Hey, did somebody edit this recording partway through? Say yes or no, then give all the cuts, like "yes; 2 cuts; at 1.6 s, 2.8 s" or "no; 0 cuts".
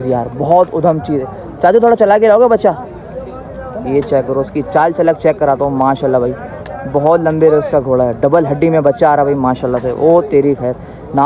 no; 0 cuts